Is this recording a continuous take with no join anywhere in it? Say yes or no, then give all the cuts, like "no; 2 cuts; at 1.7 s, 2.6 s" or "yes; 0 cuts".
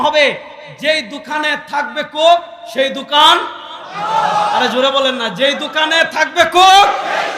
yes; 0 cuts